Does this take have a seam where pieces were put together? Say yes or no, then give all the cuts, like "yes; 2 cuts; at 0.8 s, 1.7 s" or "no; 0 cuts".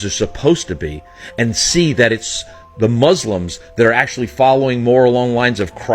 no; 0 cuts